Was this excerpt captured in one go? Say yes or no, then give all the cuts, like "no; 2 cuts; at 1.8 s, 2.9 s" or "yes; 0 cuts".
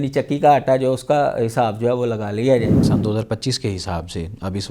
no; 1 cut; at 2.9 s